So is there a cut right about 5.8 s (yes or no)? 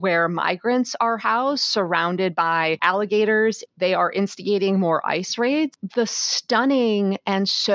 yes